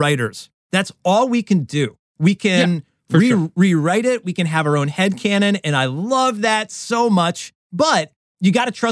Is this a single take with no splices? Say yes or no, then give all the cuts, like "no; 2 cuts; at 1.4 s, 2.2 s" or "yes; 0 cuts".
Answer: yes; 0 cuts